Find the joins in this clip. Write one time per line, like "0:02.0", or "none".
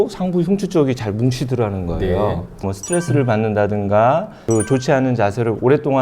0:02.7
0:04.4